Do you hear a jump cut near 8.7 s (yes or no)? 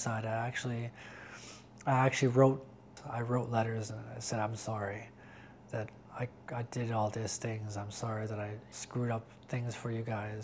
yes